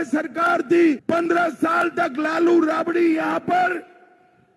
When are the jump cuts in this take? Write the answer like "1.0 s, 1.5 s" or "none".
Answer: 1.0 s